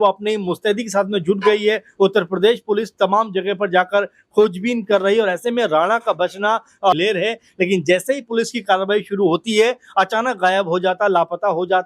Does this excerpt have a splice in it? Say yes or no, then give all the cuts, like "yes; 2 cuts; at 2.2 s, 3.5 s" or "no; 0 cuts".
yes; 1 cut; at 6.9 s